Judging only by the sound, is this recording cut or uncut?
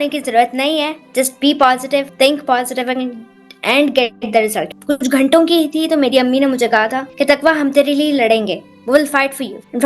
cut